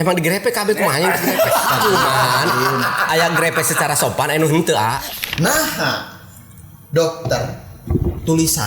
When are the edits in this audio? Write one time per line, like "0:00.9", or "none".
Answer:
0:05.1